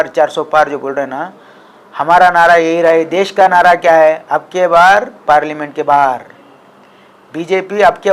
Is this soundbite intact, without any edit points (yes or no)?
yes